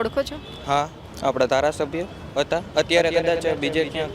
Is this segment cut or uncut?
cut